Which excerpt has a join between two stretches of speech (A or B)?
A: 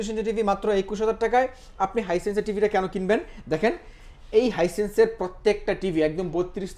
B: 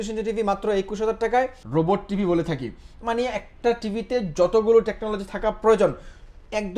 B